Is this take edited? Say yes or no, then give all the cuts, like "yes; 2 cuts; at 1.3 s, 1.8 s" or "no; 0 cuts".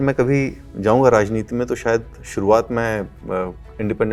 no; 0 cuts